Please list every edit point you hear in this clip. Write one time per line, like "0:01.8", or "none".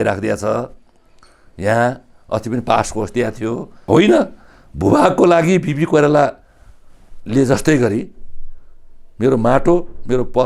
0:03.9

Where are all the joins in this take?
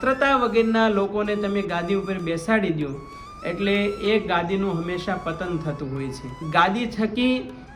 0:06.4

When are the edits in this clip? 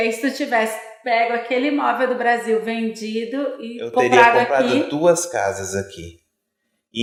none

